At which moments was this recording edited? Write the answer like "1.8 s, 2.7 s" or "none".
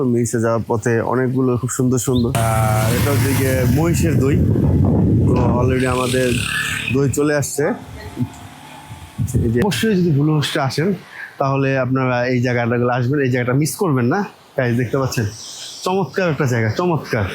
2.4 s, 9.6 s